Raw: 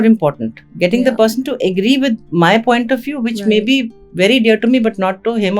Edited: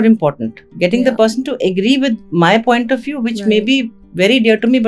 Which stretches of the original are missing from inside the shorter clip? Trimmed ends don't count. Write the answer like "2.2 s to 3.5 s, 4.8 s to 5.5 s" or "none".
none